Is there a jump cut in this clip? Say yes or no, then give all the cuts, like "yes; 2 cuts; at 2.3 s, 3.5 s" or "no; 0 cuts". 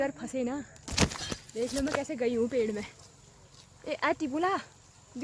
no; 0 cuts